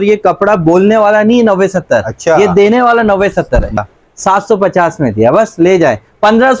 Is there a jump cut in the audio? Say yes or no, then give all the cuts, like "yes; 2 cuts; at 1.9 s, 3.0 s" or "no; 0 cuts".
yes; 1 cut; at 3.8 s